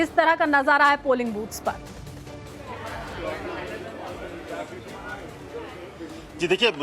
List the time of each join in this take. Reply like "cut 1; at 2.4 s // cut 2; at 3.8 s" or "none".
cut 1; at 5.4 s